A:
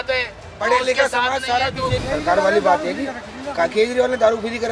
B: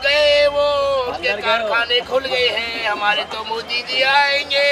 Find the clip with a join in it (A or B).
A